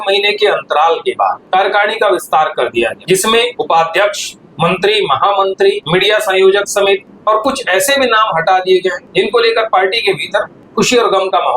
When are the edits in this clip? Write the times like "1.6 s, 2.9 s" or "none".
1.4 s, 3.4 s, 5.8 s, 7.1 s, 9.0 s, 10.6 s